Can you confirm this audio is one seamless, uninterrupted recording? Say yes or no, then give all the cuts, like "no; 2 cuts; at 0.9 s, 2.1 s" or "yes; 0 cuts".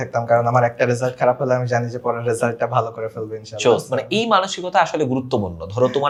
yes; 0 cuts